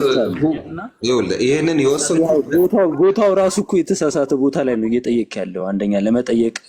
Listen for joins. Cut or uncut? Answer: uncut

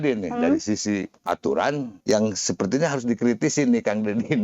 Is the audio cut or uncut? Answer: cut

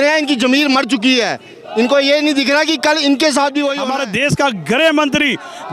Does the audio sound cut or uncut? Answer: cut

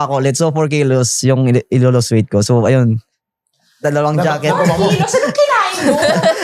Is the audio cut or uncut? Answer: uncut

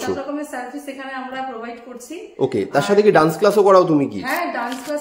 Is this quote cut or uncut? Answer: uncut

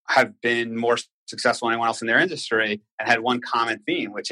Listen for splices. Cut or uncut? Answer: uncut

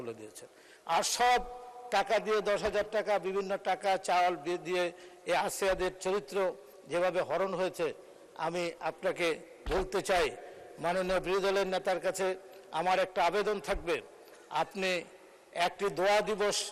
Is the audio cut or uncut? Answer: uncut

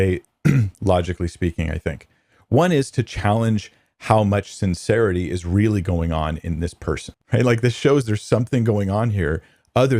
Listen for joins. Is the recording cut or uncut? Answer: cut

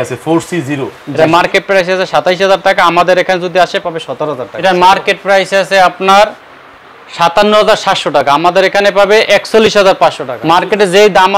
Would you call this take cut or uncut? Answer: cut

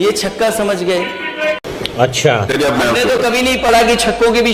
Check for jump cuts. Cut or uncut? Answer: cut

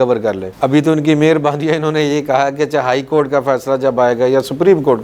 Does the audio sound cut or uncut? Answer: uncut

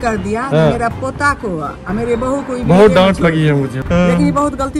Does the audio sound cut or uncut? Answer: cut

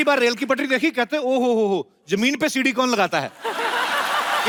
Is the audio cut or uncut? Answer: uncut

